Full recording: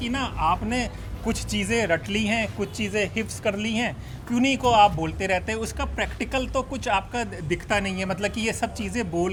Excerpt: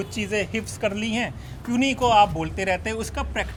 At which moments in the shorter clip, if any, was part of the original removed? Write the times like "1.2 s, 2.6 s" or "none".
none